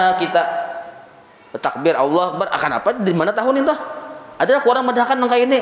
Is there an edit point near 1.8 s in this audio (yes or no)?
yes